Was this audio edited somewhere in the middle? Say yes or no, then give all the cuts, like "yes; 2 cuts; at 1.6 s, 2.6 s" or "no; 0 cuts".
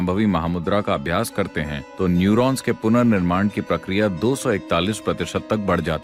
no; 0 cuts